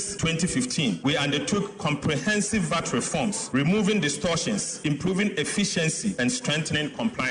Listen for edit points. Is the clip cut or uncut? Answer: uncut